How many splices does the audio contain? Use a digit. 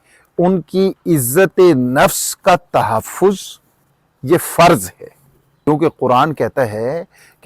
1